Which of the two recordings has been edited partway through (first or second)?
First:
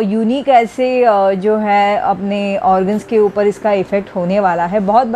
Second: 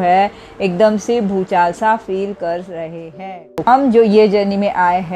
second